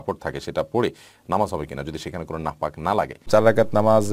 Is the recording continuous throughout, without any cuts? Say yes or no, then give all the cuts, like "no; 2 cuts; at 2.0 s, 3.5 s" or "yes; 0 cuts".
no; 1 cut; at 3.2 s